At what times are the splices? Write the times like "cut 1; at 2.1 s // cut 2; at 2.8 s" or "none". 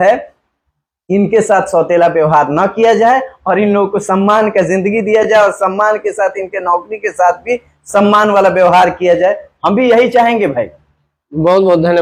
none

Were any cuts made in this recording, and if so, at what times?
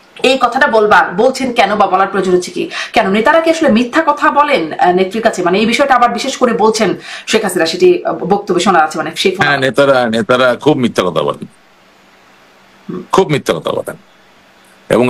none

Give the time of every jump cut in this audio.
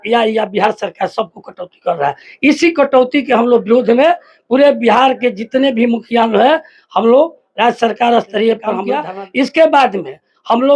cut 1; at 9.0 s

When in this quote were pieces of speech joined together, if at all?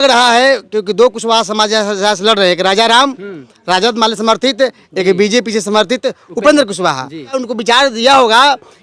cut 1; at 7.5 s

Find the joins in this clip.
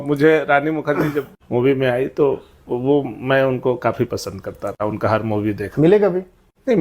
cut 1; at 1.4 s

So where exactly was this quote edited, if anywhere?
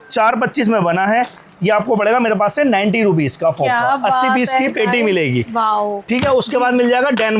none

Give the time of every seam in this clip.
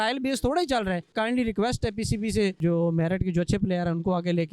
cut 1; at 1.1 s // cut 2; at 2.6 s

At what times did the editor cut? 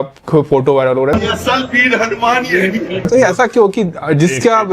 cut 1; at 1.1 s // cut 2; at 3.0 s

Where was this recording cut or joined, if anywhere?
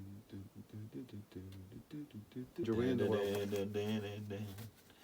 cut 1; at 2.6 s

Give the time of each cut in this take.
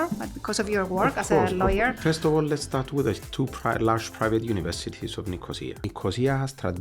cut 1; at 5.8 s

